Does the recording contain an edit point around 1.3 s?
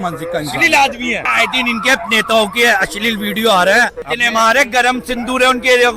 yes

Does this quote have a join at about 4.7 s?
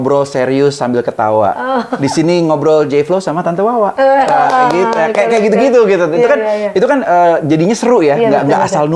no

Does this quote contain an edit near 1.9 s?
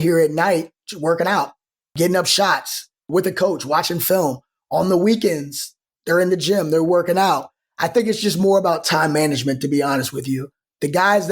yes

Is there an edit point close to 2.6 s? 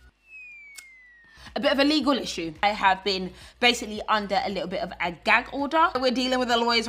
yes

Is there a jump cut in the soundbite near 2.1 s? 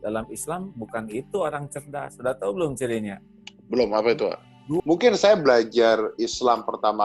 no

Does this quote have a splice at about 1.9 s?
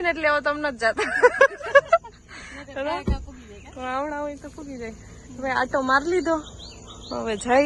no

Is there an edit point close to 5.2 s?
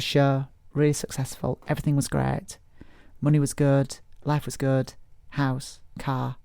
yes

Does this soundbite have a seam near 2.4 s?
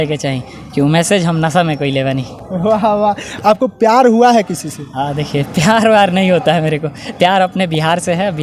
no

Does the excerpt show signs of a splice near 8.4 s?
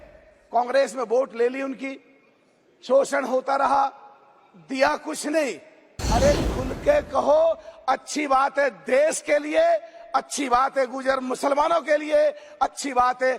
no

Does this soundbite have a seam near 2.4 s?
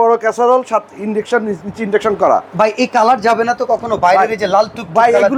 no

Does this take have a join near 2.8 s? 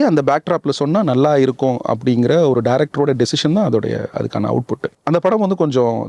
no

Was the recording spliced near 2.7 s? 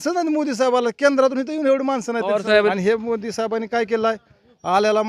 yes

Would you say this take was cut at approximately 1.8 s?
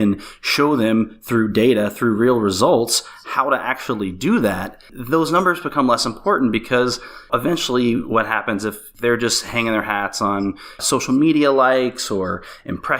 no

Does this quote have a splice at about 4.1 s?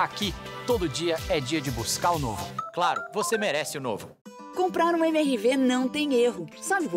yes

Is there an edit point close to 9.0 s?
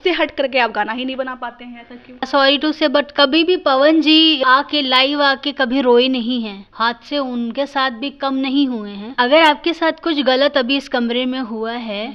yes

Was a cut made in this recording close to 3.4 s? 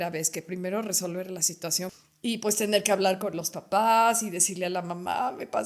no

